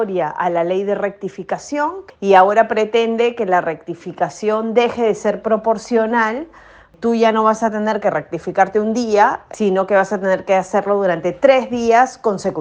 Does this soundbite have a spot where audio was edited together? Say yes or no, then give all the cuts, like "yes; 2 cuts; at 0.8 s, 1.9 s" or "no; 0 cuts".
yes; 3 cuts; at 2.0 s, 6.9 s, 9.4 s